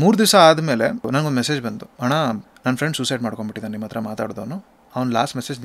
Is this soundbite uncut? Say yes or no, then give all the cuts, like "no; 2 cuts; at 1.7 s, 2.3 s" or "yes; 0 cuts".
no; 2 cuts; at 1.1 s, 2.5 s